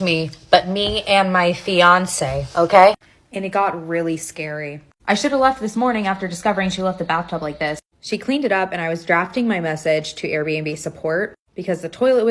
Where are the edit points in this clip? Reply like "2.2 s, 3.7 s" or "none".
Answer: none

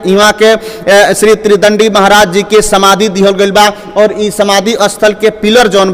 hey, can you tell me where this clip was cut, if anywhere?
none

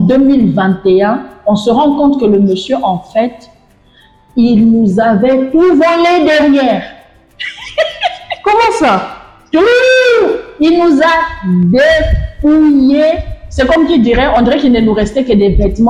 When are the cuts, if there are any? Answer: none

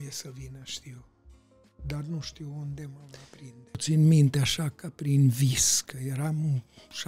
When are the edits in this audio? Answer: 3.7 s

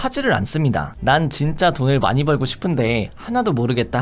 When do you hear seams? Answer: 0.9 s

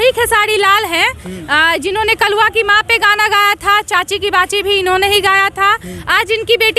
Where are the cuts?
none

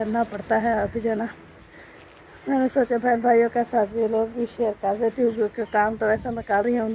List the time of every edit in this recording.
none

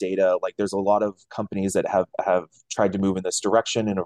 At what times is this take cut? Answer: none

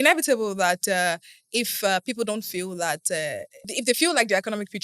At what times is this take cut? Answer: 3.6 s

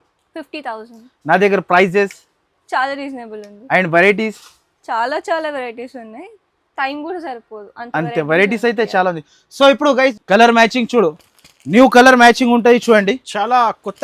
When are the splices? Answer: 10.2 s

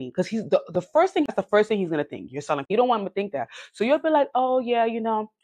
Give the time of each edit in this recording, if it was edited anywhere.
1.3 s, 2.7 s

